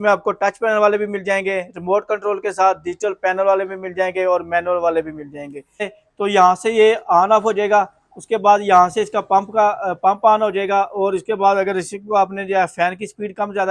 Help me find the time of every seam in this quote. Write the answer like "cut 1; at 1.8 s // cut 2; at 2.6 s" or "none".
cut 1; at 6.0 s